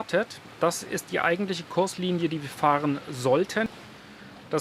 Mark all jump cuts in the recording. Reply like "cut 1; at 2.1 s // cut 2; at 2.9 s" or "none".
cut 1; at 3.7 s